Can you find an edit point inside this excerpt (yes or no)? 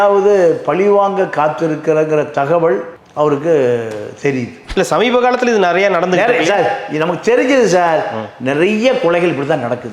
yes